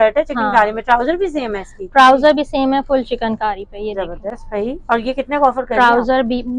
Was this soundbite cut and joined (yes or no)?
no